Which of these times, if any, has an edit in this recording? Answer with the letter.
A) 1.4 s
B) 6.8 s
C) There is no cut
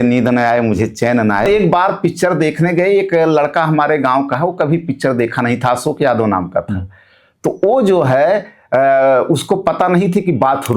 A